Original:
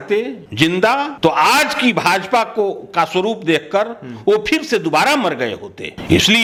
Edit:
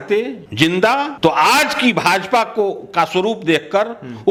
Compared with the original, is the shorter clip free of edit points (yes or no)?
yes